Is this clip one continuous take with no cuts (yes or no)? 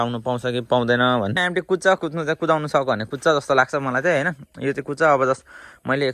no